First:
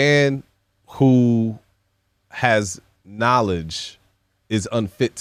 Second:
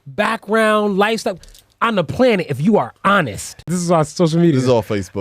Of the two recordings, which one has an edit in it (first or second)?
second